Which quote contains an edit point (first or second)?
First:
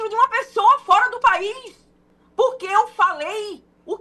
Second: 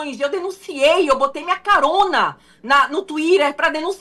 first